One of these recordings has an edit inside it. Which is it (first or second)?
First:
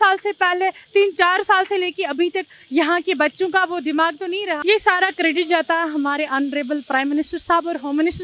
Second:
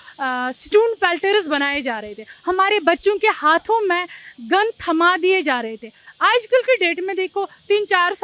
first